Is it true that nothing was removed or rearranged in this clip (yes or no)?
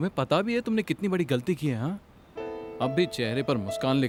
yes